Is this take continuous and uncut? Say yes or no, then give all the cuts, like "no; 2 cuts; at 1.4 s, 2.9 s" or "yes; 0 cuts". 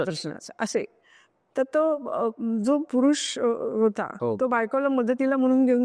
no; 1 cut; at 4.1 s